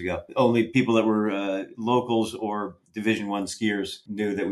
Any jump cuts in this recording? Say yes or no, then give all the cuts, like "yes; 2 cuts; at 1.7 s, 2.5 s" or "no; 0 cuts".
no; 0 cuts